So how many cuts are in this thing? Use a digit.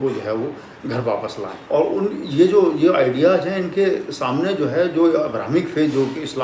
1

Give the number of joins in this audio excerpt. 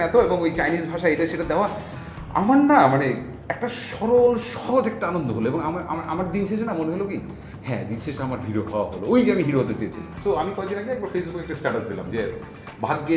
1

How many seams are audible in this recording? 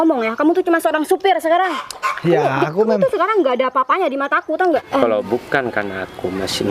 1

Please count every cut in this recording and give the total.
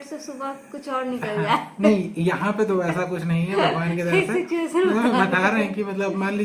0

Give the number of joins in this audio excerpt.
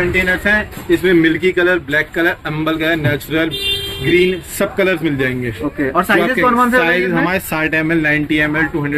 0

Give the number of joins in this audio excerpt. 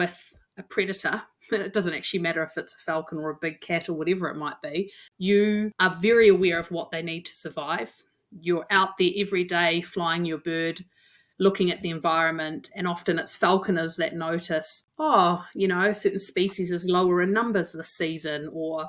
3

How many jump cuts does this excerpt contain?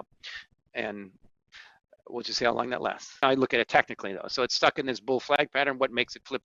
1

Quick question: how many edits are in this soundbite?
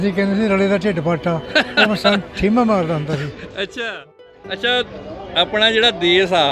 1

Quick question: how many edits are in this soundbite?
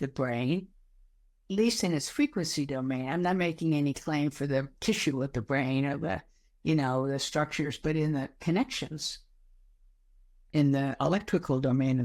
2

